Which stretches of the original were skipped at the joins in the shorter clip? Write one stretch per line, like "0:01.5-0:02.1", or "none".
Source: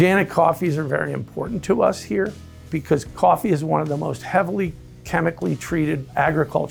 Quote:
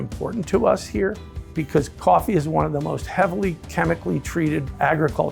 0:04.8-0:05.0